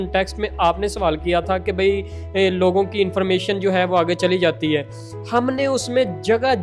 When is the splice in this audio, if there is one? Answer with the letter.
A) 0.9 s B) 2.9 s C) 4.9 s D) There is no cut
D